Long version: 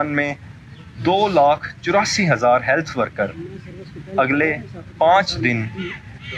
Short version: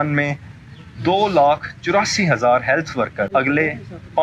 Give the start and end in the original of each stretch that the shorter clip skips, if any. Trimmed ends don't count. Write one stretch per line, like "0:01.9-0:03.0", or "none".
0:03.3-0:04.1